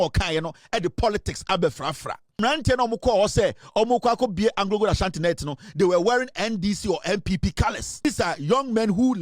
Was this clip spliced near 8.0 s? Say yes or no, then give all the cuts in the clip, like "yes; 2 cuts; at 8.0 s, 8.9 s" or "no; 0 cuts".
yes; 2 cuts; at 2.4 s, 8.0 s